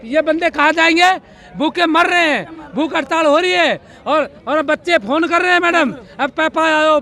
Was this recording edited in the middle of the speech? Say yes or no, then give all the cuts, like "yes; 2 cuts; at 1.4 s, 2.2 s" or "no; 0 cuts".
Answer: no; 0 cuts